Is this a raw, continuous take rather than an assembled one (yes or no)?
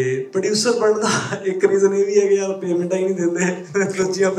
yes